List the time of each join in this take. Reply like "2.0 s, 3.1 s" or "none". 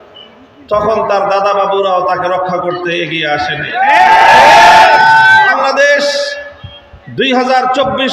5.5 s

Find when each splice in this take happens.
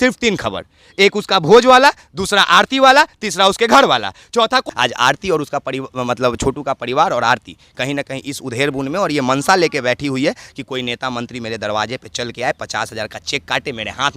4.7 s

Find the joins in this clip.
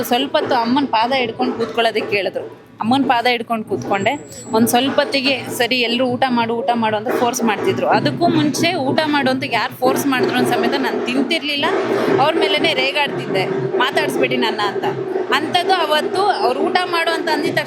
none

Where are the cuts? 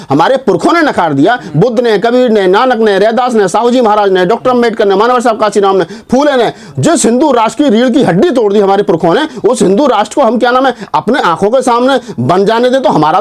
none

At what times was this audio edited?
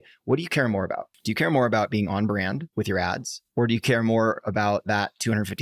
1.1 s, 2.7 s, 3.4 s

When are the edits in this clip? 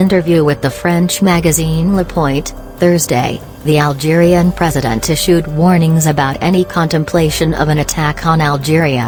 none

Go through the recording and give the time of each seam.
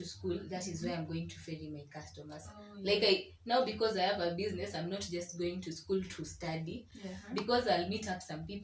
none

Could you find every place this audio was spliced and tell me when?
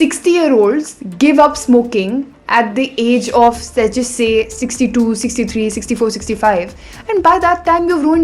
none

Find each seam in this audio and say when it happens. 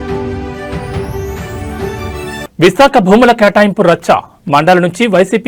none

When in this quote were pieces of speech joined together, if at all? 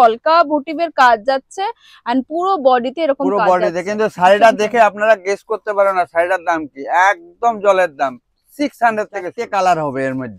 9.4 s

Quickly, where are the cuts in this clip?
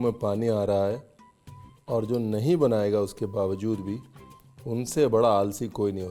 none

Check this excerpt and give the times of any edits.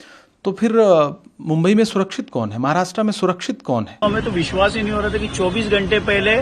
4.0 s

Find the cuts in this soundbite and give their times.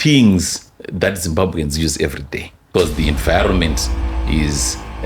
2.7 s

